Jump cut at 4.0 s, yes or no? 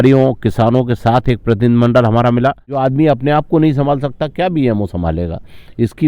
no